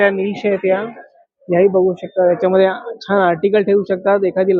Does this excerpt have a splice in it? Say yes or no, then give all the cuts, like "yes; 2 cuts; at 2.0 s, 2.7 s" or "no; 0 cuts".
no; 0 cuts